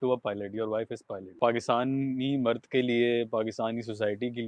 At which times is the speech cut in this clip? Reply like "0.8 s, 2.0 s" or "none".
1.3 s